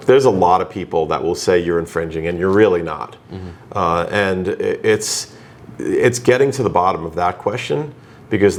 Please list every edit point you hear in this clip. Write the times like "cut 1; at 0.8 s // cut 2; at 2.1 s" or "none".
none